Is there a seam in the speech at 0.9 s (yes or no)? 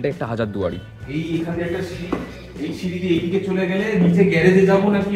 yes